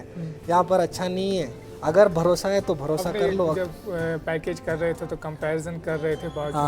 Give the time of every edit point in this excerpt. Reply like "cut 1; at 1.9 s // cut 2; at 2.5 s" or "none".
cut 1; at 3.5 s